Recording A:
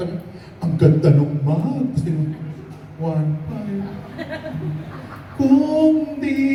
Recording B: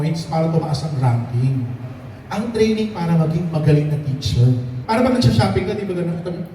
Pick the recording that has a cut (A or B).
B